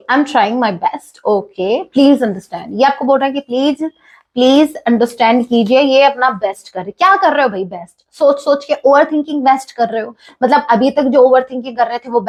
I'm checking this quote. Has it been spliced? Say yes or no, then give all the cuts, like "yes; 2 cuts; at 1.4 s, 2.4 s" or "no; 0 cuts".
no; 0 cuts